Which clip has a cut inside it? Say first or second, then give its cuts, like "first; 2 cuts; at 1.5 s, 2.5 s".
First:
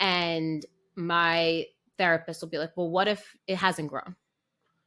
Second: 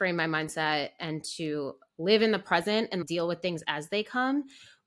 second; 1 cut; at 3.0 s